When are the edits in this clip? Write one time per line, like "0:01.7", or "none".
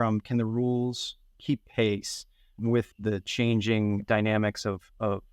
0:01.2
0:02.8
0:04.0